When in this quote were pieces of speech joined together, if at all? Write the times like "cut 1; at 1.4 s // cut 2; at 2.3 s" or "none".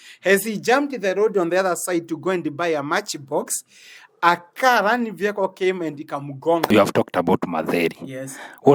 cut 1; at 6.7 s